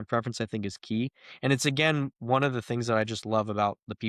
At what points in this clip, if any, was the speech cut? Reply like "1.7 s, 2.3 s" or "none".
none